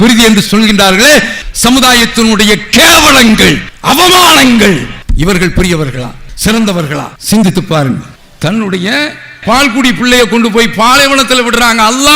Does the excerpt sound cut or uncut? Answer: cut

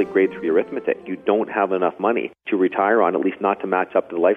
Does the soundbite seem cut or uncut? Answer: cut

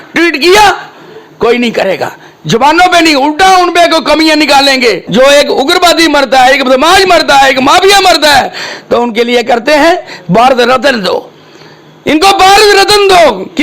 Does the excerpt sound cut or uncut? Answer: cut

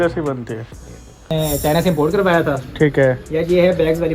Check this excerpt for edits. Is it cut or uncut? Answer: cut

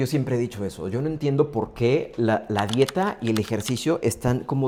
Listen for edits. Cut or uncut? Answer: uncut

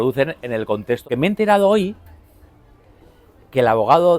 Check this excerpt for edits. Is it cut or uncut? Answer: cut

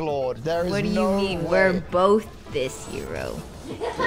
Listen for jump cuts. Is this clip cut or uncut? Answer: uncut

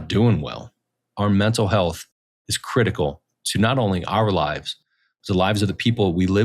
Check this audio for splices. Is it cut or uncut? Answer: cut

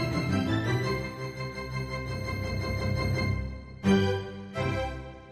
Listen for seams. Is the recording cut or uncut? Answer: uncut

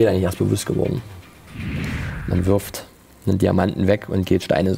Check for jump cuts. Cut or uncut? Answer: cut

